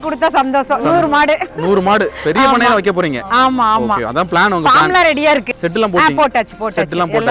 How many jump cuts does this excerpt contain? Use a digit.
1